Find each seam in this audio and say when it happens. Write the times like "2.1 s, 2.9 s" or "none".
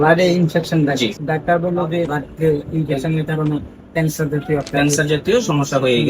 1.2 s, 2.2 s